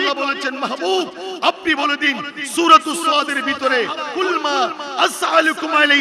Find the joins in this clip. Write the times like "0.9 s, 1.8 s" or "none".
none